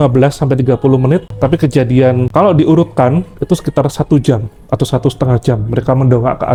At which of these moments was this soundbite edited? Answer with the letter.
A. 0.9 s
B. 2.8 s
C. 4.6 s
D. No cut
D